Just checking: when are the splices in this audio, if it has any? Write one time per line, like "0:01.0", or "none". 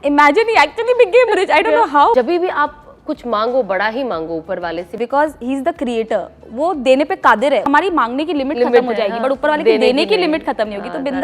0:02.1
0:04.9
0:07.7